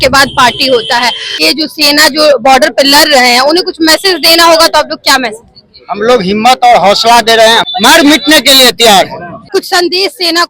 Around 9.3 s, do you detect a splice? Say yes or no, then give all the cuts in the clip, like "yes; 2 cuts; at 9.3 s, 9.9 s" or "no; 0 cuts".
yes; 3 cuts; at 1.4 s, 7.7 s, 9.3 s